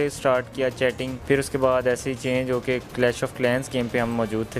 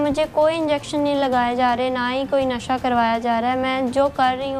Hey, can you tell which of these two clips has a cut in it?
first; 1 cut; at 1.1 s

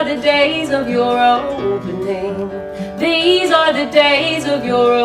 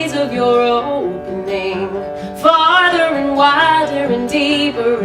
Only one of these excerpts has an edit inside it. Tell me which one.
second; 1 cut; at 2.0 s

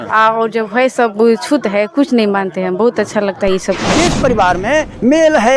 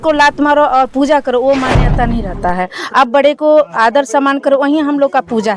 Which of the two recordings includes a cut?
first; 1 cut; at 3.8 s

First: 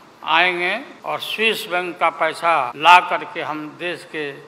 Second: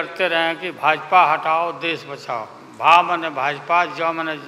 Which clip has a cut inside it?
first; 2 cuts; at 0.9 s, 2.7 s

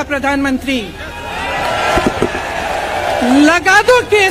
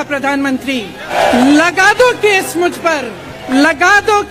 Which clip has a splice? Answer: second; 2 cuts; at 1.1 s, 3.4 s

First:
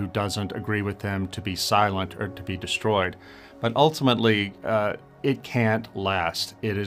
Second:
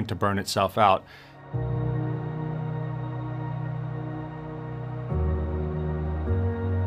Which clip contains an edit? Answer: second; 1 cut; at 1.2 s

